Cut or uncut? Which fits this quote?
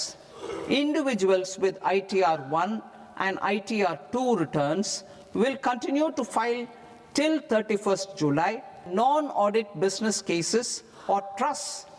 cut